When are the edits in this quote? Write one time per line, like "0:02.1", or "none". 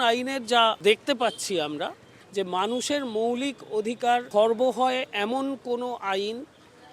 0:00.8
0:02.0
0:04.3

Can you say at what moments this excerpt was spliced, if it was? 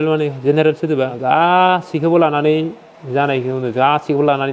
0:01.2

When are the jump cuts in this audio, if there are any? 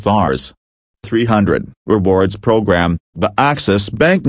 0:01.1
0:03.0

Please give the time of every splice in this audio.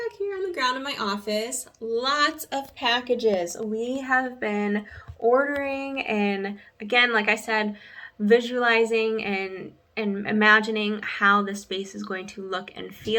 none

